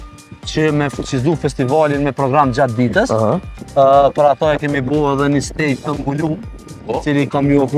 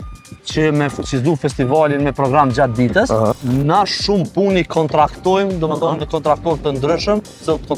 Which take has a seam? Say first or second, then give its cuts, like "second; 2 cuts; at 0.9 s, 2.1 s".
second; 1 cut; at 3.4 s